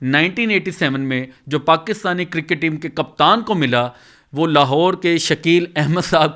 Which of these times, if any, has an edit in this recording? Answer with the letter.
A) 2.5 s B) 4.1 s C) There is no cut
C